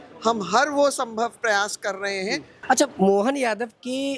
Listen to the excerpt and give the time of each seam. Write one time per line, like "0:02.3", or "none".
0:02.5